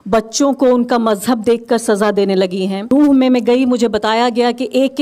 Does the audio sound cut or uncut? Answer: cut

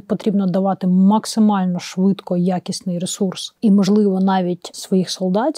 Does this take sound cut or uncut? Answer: cut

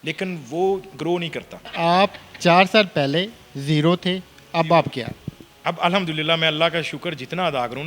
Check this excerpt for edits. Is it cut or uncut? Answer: cut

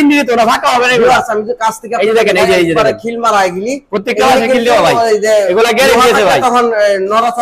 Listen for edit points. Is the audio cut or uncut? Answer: uncut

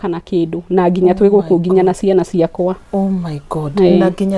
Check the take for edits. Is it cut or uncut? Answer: uncut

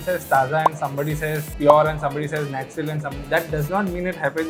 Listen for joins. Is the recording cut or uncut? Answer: uncut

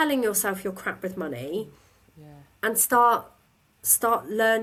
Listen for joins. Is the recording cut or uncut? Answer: uncut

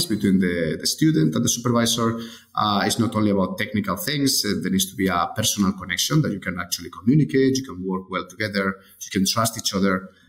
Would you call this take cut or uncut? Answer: uncut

